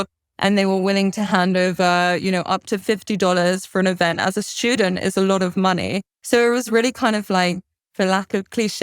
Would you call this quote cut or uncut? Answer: cut